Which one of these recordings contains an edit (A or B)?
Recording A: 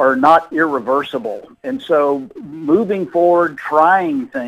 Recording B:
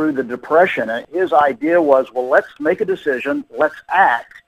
B